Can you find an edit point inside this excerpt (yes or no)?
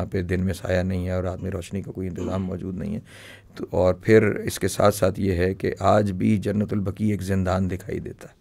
no